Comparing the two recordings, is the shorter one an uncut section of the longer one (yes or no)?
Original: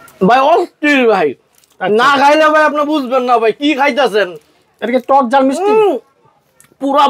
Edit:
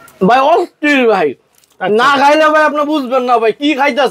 yes